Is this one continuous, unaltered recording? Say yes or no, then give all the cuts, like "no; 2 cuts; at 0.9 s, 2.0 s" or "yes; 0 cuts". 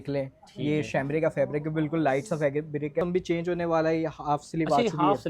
no; 1 cut; at 3.0 s